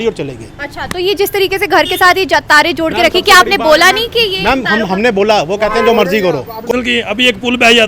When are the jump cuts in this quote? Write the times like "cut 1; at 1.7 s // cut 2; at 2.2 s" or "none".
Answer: cut 1; at 6.7 s

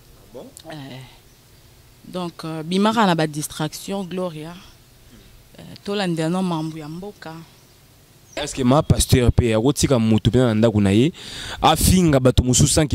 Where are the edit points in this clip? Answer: cut 1; at 8.4 s

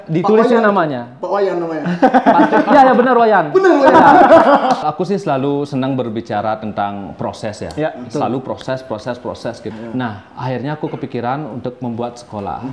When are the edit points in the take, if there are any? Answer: cut 1; at 4.8 s // cut 2; at 9.7 s

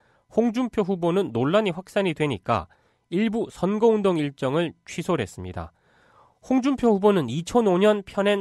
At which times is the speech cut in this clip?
cut 1; at 3.5 s

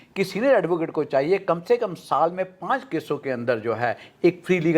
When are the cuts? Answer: none

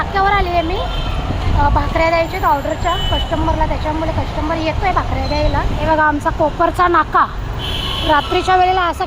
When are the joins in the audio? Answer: cut 1; at 5.8 s

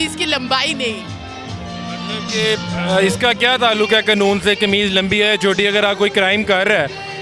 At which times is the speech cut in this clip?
none

